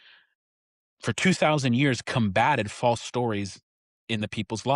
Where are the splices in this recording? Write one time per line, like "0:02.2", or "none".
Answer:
none